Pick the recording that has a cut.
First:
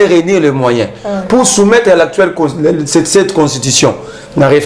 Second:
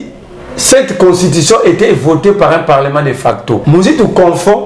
second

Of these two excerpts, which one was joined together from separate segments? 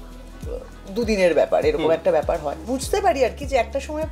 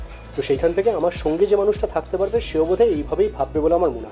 first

